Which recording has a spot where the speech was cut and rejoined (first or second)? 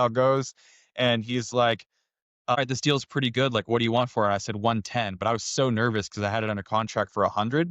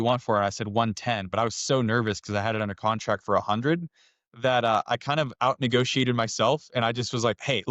first